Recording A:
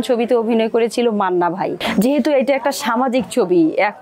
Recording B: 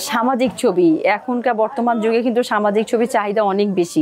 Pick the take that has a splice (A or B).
A